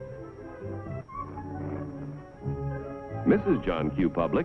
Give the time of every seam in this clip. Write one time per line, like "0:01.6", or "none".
none